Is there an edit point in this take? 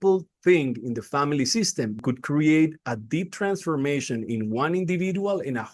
yes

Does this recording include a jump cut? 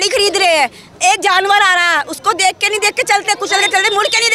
no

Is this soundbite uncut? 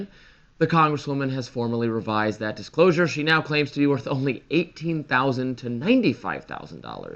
yes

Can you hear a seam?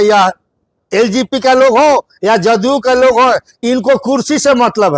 no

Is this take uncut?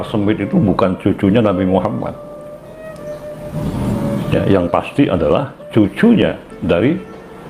yes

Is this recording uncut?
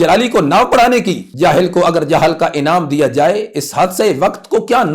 no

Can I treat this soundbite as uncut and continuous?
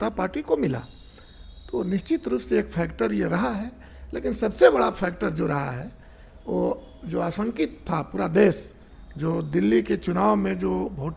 yes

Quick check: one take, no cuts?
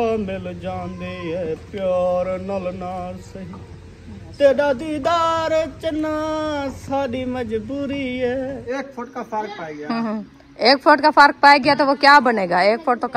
no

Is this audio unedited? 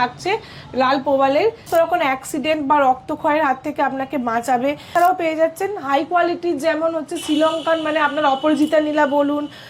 no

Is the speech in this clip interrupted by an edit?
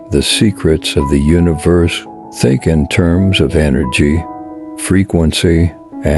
no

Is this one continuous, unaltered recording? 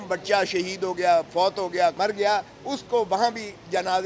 no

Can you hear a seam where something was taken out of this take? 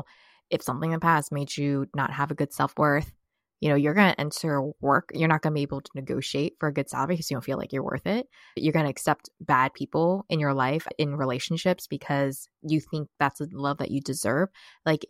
yes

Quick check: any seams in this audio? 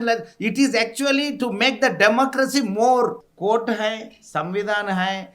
yes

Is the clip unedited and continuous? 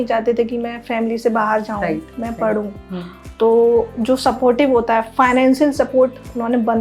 yes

